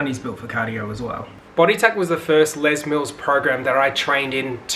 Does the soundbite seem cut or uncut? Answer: cut